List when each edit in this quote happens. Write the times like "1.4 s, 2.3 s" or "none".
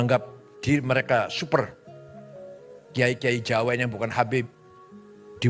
none